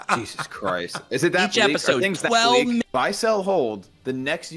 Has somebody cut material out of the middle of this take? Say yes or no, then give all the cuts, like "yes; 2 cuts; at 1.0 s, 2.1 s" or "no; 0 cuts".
yes; 1 cut; at 2.8 s